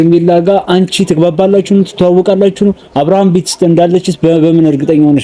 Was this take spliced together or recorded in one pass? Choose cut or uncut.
uncut